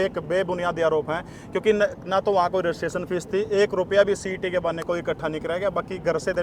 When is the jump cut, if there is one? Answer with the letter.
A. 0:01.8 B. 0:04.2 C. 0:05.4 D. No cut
D